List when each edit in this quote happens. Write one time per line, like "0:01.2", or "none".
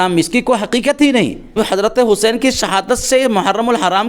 0:01.5